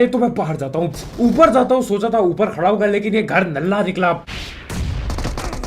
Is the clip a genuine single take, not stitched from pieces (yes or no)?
no